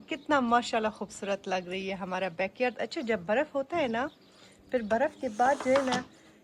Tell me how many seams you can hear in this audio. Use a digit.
0